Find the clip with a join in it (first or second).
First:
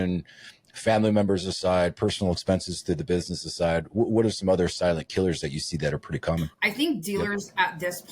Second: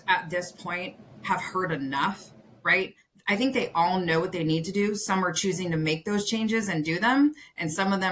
first